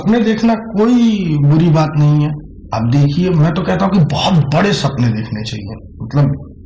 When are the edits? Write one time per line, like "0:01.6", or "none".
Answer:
none